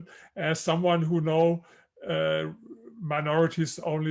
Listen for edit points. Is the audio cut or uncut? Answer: uncut